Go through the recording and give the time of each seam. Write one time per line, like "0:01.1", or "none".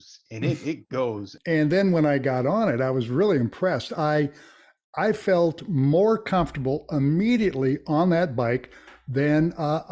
0:01.3